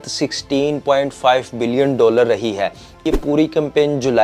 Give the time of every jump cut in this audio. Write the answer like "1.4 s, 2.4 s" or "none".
3.0 s